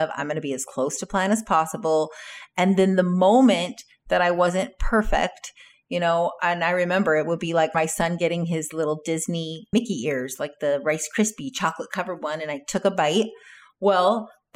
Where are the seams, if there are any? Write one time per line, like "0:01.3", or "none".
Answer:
0:07.7
0:09.7